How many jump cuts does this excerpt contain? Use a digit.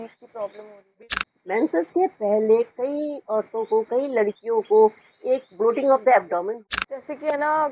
2